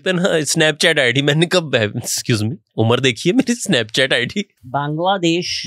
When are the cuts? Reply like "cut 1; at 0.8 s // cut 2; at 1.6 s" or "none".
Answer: cut 1; at 4.6 s